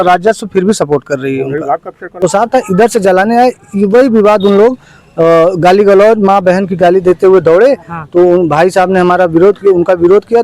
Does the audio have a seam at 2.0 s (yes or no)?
yes